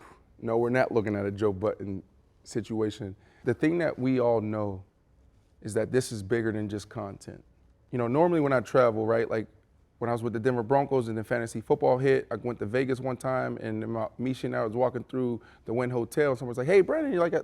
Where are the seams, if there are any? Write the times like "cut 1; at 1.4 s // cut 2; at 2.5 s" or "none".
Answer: cut 1; at 3.3 s // cut 2; at 7.7 s